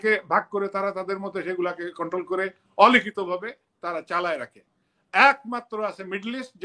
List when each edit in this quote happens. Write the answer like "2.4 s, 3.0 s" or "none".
none